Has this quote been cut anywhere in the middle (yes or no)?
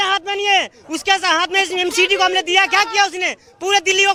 no